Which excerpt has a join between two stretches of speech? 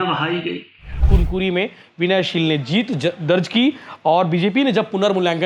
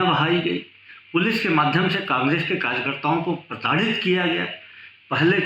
first; 1 cut; at 1.1 s

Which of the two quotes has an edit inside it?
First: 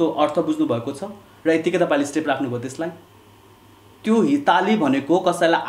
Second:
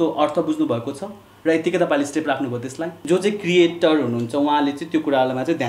second; 1 cut; at 2.9 s

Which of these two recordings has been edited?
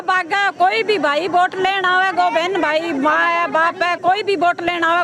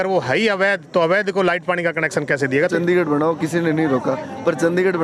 second; 1 cut; at 2.7 s

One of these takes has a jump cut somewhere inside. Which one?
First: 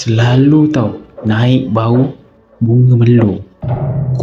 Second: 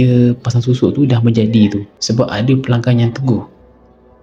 second; 1 cut; at 1.9 s

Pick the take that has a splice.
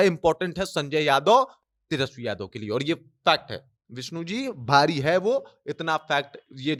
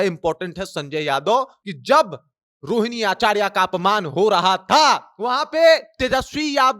second; 1 cut; at 1.7 s

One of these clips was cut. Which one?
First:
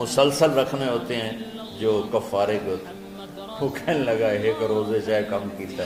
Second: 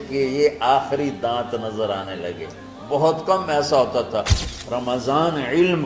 second; 1 cut; at 4.4 s

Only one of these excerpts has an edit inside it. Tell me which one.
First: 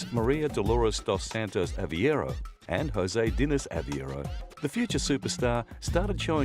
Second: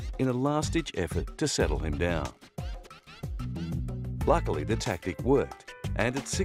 first; 1 cut; at 3.6 s

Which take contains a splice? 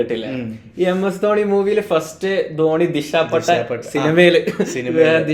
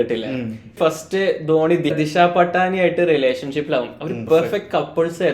second; 3 cuts; at 0.7 s, 1.9 s, 4.2 s

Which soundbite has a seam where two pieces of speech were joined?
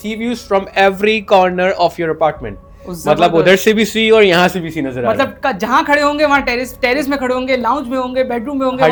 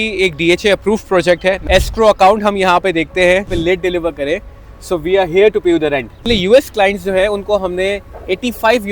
second; 3 cuts; at 1.6 s, 3.5 s, 6.3 s

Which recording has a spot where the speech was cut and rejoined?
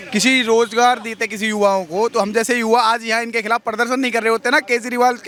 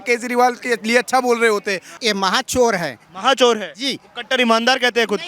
second; 1 cut; at 1.8 s

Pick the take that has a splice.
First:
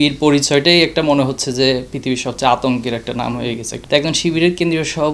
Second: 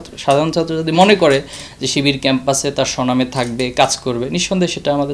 first; 1 cut; at 3.7 s

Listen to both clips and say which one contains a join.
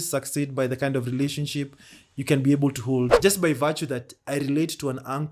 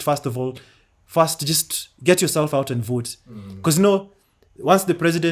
first; 1 cut; at 3.2 s

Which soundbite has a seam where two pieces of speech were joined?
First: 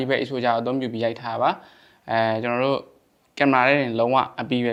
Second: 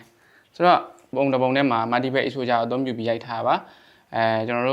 second; 1 cut; at 1.1 s

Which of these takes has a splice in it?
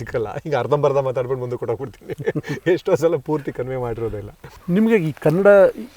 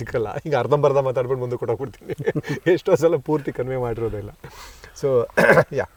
first; 1 cut; at 4.5 s

